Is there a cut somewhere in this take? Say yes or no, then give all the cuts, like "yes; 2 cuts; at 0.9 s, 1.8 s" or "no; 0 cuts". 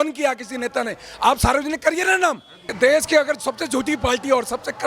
yes; 1 cut; at 2.7 s